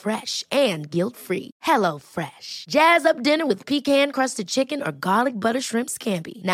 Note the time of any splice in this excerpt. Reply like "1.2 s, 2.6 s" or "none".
none